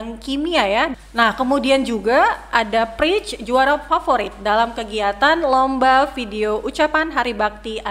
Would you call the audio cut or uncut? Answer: cut